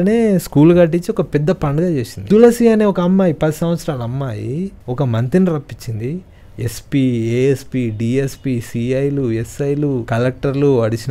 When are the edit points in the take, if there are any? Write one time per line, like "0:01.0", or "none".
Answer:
0:02.1
0:04.8
0:10.0